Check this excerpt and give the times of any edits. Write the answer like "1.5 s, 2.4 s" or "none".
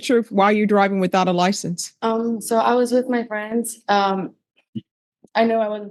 none